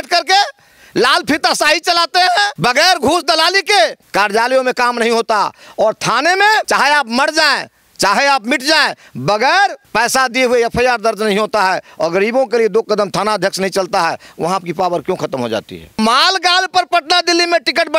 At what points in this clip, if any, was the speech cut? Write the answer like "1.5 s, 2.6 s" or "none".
2.5 s, 4.0 s, 6.7 s, 9.8 s, 16.0 s

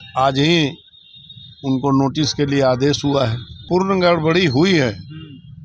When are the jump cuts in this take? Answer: 3.7 s

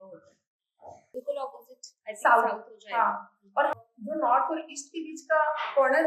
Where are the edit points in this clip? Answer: 1.2 s, 3.8 s

